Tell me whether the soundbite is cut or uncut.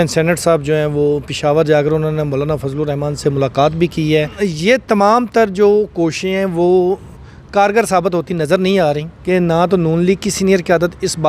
cut